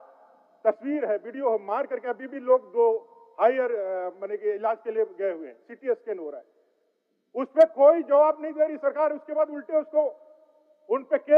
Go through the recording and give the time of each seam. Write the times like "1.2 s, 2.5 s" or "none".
none